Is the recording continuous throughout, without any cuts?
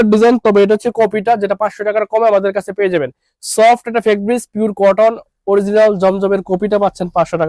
yes; 0 cuts

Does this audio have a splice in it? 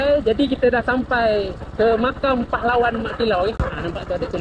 no; 0 cuts

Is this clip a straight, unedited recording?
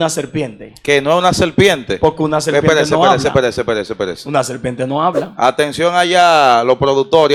yes; 0 cuts

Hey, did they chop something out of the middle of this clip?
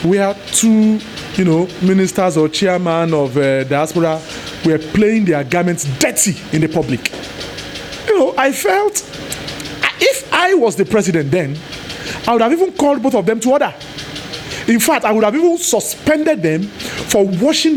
no; 0 cuts

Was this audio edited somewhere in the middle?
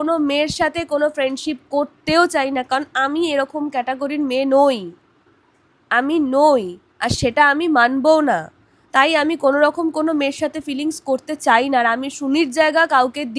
no; 0 cuts

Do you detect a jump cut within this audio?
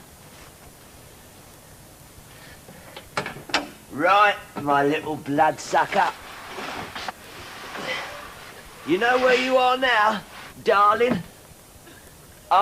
yes; 1 cut; at 1.6 s

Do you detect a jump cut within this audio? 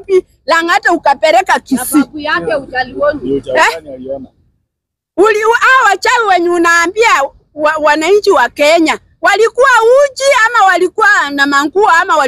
no; 0 cuts

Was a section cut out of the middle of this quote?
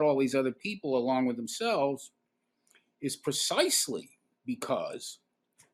no; 0 cuts

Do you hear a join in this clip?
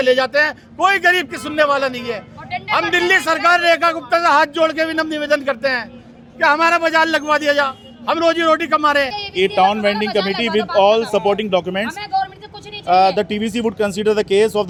no; 0 cuts

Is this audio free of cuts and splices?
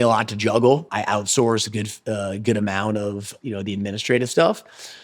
no; 2 cuts; at 0.9 s, 3.3 s

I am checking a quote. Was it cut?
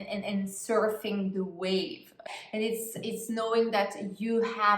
yes; 1 cut; at 2.3 s

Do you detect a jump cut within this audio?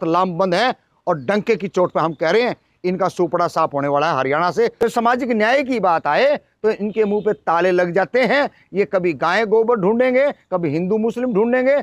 yes; 1 cut; at 4.7 s

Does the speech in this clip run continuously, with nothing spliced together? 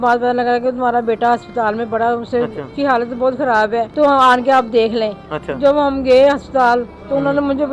no; 2 cuts; at 2.6 s, 3.9 s

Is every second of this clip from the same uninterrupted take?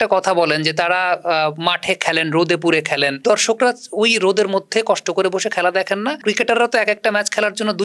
no; 2 cuts; at 3.2 s, 6.2 s

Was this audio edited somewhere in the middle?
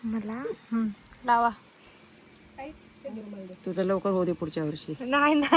no; 0 cuts

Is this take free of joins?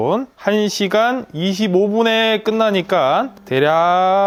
yes; 0 cuts

